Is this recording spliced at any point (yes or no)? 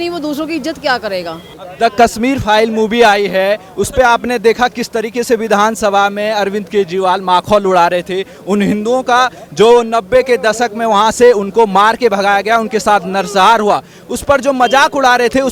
no